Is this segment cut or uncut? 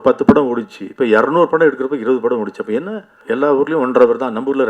cut